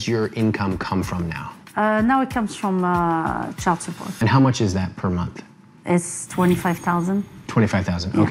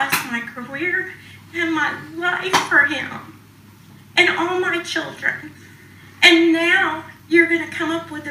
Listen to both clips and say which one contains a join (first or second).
first